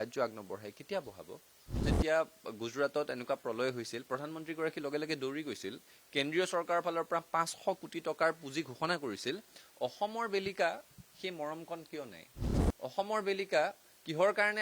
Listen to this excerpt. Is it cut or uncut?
cut